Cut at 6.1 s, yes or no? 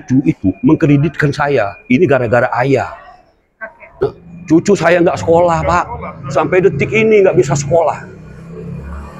no